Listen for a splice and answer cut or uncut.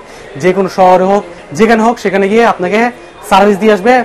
uncut